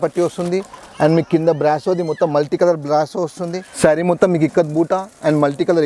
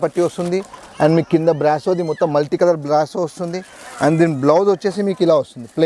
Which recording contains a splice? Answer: first; 1 cut; at 3.6 s

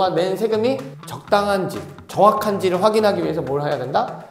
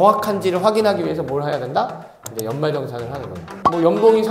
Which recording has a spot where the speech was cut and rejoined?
second; 1 cut; at 3.4 s

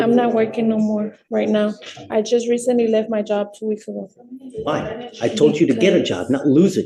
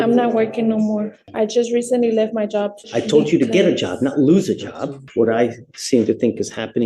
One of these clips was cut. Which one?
second; 3 cuts; at 1.2 s, 2.8 s, 5.0 s

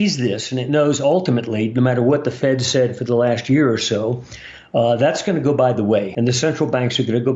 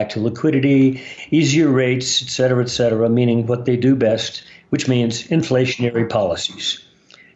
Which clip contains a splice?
first; 1 cut; at 6.1 s

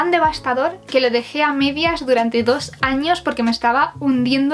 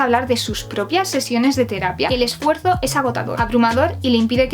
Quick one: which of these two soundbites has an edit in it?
second; 1 cut; at 2.1 s

